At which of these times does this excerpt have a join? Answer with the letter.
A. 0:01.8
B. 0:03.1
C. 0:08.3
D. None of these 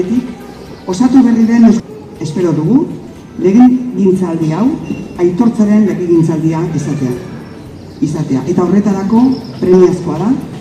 A